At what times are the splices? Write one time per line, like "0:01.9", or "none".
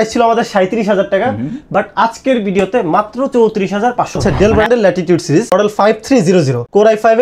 0:04.2